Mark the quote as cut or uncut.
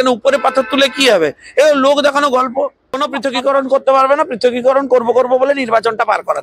cut